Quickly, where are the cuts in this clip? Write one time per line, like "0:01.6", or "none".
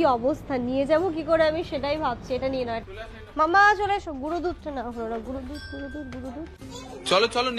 0:02.8
0:06.6